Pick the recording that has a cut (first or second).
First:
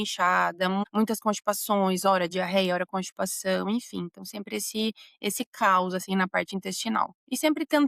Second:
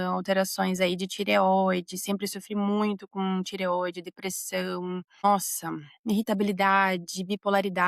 second